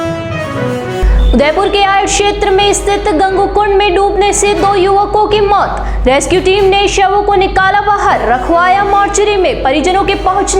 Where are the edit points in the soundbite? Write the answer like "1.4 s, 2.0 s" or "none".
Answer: 0.9 s